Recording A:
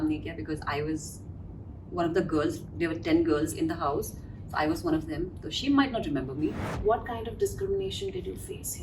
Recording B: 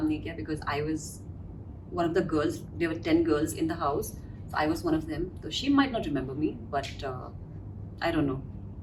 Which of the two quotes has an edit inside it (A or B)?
A